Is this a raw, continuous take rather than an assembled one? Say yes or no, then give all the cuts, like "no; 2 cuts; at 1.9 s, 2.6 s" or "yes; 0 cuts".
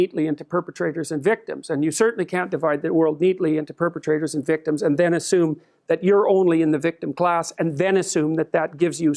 yes; 0 cuts